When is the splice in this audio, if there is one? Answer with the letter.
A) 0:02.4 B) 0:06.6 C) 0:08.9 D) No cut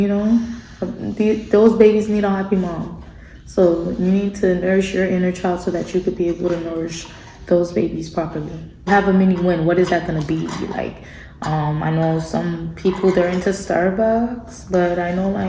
C